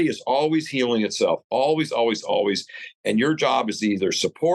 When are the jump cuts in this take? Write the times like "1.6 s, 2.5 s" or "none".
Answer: none